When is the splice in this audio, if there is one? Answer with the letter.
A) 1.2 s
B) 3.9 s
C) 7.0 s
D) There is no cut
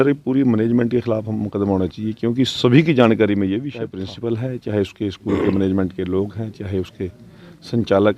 B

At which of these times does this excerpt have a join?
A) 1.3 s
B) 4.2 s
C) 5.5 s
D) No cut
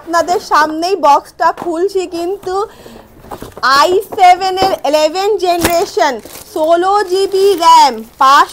D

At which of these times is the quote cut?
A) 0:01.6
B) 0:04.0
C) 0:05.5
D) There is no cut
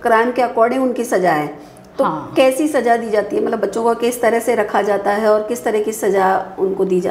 D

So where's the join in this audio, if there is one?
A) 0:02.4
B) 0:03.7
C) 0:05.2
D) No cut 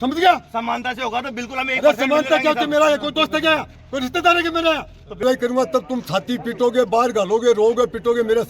C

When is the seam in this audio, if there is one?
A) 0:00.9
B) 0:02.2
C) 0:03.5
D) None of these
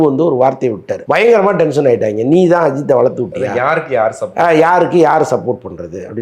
A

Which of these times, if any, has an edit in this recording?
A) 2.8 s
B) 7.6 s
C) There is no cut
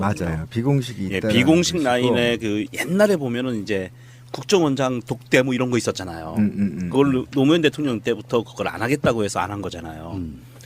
B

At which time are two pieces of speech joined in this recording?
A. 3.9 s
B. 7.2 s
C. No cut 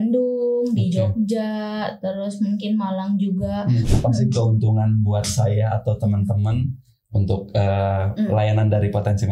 A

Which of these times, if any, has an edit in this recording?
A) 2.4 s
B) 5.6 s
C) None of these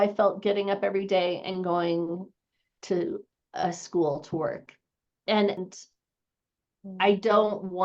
B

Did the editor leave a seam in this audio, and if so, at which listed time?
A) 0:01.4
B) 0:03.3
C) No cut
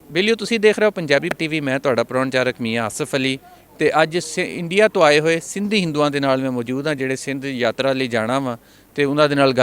A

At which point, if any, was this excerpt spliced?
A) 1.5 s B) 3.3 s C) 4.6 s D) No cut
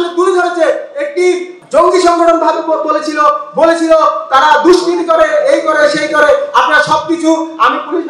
A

